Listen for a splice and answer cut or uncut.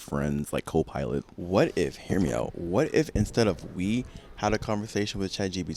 cut